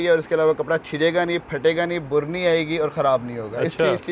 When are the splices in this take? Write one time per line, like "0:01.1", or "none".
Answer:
none

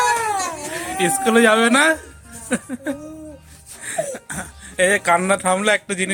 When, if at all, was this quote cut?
none

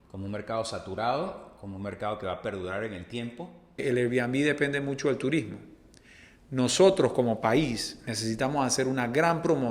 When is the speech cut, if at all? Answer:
0:03.8

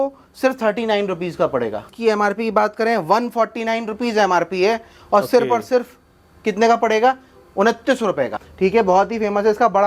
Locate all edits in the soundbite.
0:01.9
0:08.4

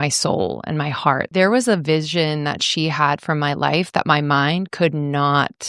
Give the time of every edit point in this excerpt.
0:01.2

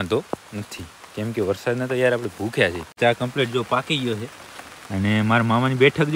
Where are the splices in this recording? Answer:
0:03.0

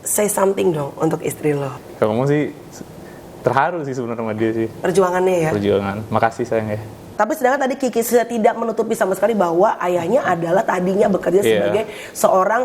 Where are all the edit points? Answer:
0:01.8
0:07.1

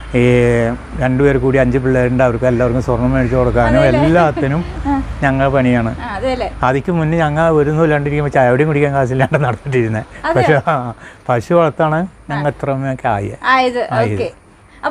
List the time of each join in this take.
none

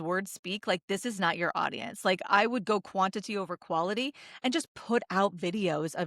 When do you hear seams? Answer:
none

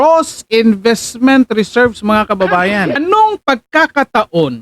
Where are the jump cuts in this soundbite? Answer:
0:03.0

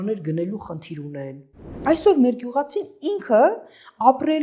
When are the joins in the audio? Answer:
0:01.8

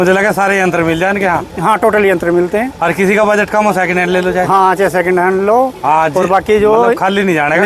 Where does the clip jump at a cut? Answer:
none

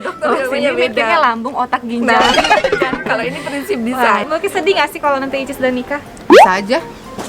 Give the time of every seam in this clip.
0:04.3

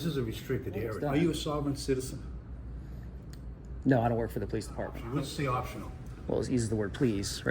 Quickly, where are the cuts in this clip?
0:01.0
0:05.0

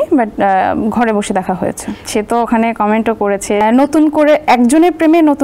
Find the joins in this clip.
0:02.0
0:03.6

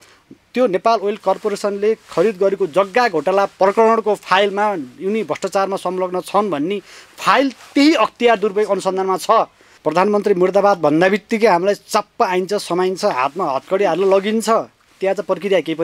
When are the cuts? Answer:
0:09.6

